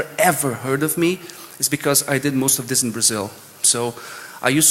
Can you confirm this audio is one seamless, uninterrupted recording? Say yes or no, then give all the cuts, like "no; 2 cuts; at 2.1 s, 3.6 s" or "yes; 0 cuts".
yes; 0 cuts